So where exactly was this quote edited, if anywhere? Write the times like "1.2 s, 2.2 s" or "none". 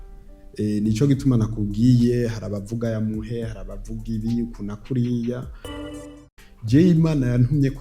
6.0 s